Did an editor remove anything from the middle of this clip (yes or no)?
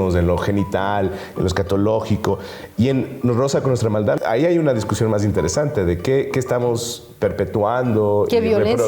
yes